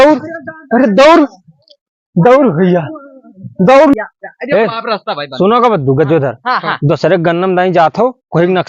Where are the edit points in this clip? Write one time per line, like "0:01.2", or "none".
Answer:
0:03.9